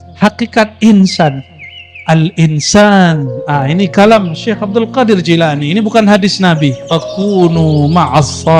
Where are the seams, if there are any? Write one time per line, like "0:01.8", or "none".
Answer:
0:07.1

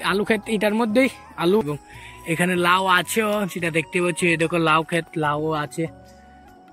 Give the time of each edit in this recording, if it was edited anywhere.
0:01.6

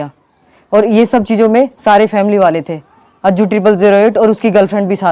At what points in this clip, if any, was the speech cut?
none

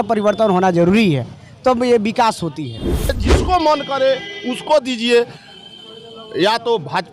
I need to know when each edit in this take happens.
0:03.0

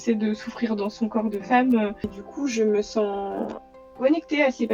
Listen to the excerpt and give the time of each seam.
0:02.2

